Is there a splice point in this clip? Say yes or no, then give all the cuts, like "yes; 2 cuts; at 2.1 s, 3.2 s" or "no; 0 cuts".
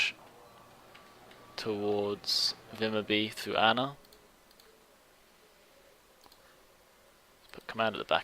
yes; 1 cut; at 3.5 s